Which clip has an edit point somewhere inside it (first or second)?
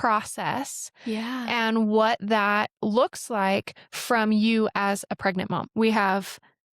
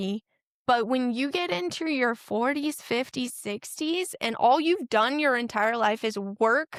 first